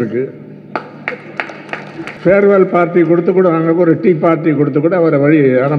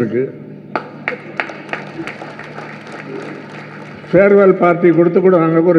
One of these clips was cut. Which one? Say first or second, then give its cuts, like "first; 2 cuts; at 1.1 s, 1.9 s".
first; 1 cut; at 2.2 s